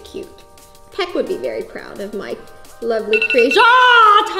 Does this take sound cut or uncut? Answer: uncut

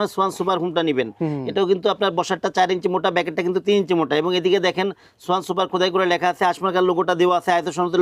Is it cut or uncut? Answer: uncut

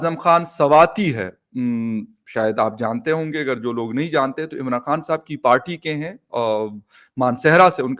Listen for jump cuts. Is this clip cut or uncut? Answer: uncut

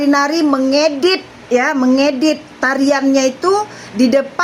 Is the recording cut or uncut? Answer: uncut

